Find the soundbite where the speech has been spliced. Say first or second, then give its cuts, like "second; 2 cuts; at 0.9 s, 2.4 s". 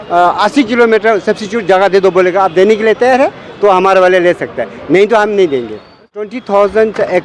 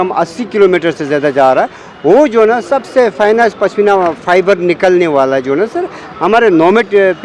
first; 1 cut; at 6.3 s